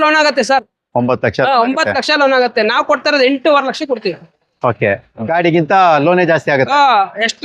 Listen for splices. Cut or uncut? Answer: uncut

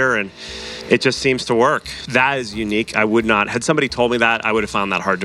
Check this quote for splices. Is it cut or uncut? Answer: cut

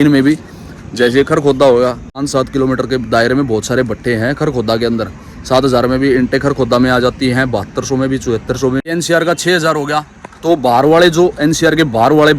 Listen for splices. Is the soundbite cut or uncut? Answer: cut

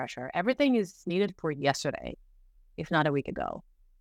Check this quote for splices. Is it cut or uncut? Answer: uncut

